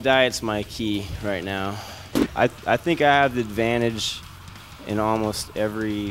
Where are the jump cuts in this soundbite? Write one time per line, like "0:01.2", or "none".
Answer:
0:02.1